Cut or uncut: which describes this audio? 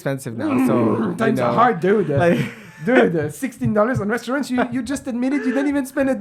uncut